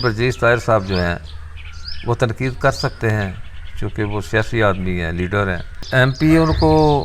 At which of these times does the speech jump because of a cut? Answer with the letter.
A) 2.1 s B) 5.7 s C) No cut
B